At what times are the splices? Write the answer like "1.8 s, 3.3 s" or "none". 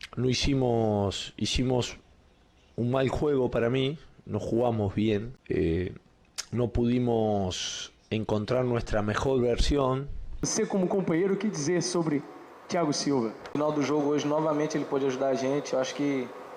5.3 s, 10.5 s, 13.6 s